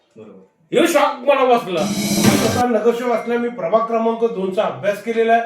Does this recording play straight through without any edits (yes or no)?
no